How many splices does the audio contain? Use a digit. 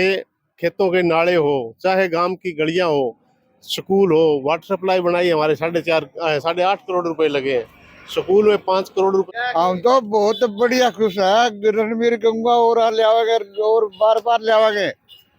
1